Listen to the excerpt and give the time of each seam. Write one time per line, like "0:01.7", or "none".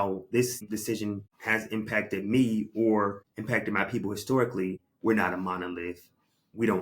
0:00.8
0:03.3
0:04.9